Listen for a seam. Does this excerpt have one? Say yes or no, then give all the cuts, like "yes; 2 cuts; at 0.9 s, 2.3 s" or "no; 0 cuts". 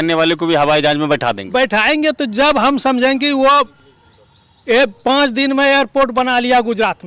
no; 0 cuts